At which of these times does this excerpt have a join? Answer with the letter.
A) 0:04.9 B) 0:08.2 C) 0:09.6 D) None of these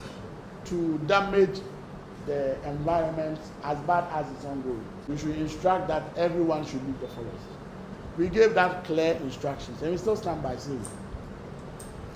A